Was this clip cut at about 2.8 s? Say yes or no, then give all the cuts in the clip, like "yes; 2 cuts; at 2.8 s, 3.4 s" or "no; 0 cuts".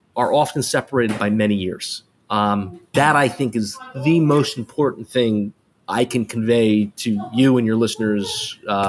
no; 0 cuts